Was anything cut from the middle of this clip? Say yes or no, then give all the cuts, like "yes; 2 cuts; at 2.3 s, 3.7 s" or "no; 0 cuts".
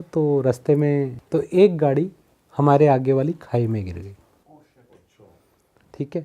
yes; 1 cut; at 1.2 s